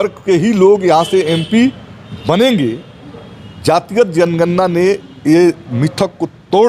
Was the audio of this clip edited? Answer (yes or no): no